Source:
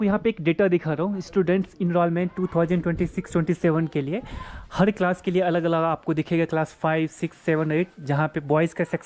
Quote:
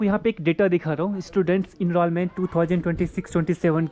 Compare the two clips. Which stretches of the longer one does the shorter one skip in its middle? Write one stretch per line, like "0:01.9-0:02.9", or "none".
none